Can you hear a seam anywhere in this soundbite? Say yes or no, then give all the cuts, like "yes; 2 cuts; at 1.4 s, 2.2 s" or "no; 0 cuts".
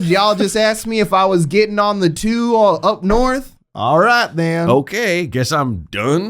no; 0 cuts